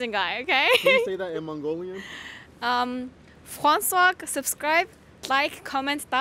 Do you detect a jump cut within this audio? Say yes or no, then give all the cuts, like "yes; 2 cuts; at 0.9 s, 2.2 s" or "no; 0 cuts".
no; 0 cuts